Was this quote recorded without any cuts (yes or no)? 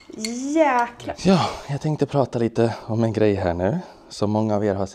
no